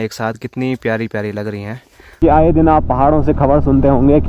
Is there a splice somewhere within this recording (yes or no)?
yes